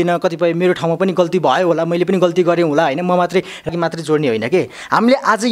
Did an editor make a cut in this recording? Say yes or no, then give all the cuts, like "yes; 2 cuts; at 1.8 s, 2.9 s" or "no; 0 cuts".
yes; 1 cut; at 3.7 s